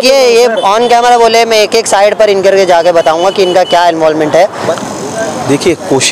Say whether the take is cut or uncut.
cut